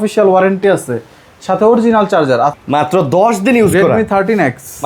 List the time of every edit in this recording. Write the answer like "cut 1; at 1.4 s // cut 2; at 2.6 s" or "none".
cut 1; at 2.6 s